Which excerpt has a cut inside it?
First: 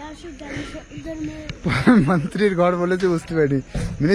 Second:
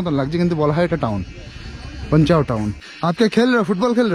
second; 1 cut; at 2.8 s

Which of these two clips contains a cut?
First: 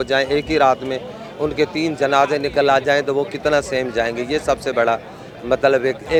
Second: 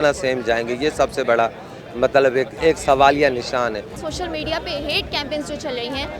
second; 1 cut; at 3.9 s

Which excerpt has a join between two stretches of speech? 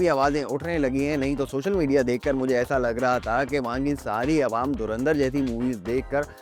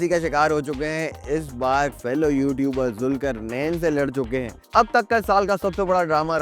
second; 2 cuts; at 2.0 s, 4.5 s

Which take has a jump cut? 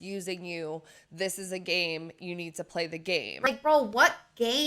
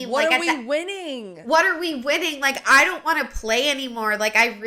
first; 1 cut; at 3.5 s

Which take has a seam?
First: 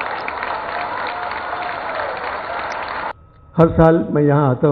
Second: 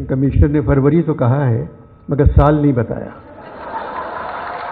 first; 1 cut; at 3.1 s

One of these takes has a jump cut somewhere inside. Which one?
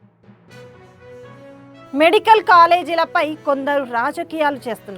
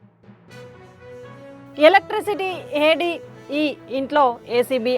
second; 1 cut; at 1.2 s

